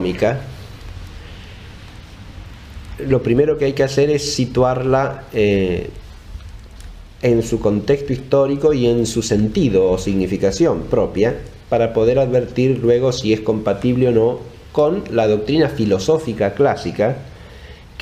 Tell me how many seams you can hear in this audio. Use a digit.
1